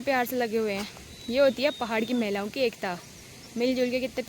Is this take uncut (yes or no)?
yes